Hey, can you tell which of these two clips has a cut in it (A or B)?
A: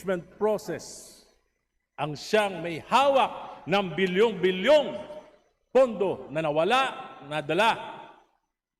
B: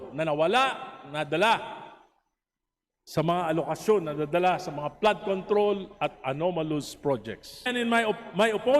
B